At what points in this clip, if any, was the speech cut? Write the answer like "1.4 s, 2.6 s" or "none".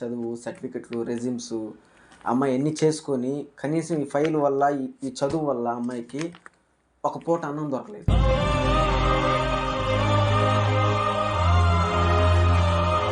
none